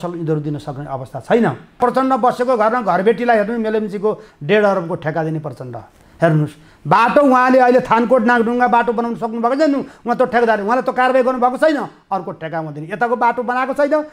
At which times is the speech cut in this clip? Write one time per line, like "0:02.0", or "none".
0:01.8